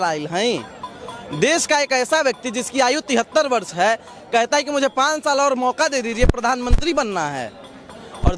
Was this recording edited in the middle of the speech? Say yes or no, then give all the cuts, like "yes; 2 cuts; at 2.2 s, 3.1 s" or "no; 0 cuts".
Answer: no; 0 cuts